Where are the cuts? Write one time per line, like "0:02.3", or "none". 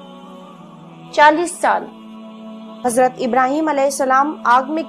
0:01.1

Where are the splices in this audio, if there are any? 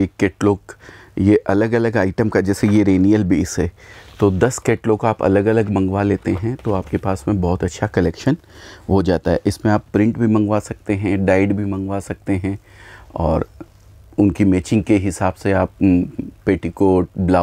none

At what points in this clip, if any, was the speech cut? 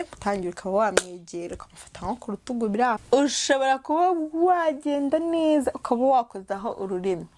0:03.0

